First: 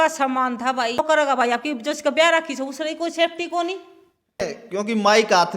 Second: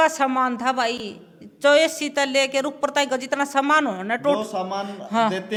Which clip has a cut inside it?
first; 2 cuts; at 1.0 s, 4.4 s

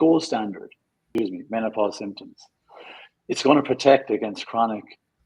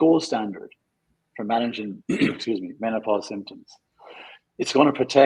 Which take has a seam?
first; 1 cut; at 1.1 s

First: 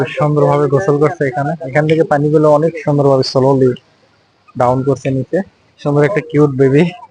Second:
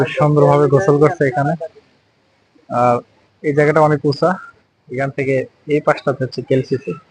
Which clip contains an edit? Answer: first; 2 cuts; at 1.7 s, 5.7 s

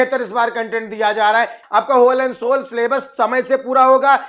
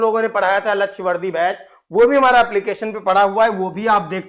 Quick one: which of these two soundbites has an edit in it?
first; 1 cut; at 1.6 s

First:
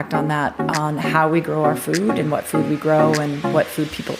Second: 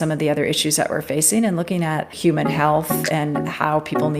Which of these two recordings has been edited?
second; 1 cut; at 2.1 s

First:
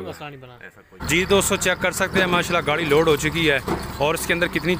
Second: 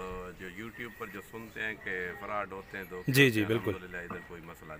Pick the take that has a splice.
first; 1 cut; at 1.0 s

